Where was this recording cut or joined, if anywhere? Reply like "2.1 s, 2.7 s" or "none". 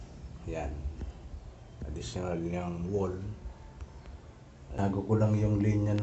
4.8 s